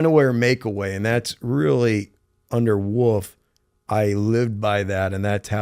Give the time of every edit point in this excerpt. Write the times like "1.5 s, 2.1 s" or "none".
none